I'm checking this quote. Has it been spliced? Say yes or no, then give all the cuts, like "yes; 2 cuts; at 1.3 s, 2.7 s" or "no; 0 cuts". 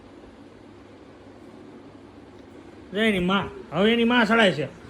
no; 0 cuts